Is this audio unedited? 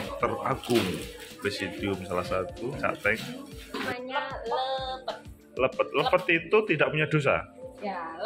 no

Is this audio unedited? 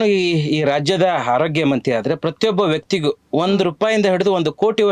yes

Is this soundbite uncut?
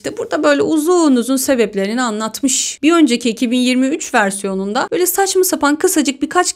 yes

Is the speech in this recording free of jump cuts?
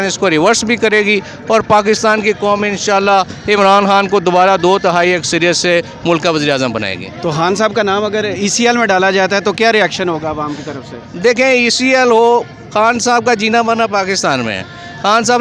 yes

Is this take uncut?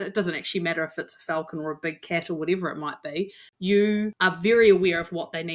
no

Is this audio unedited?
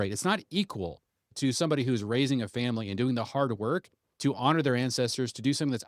no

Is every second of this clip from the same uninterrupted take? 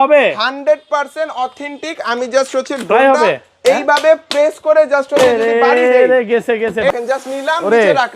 no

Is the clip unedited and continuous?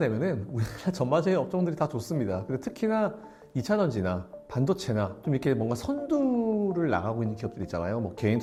yes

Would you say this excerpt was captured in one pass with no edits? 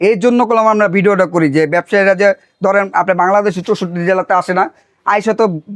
yes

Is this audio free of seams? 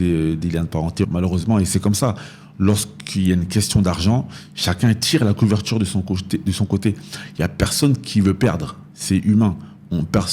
no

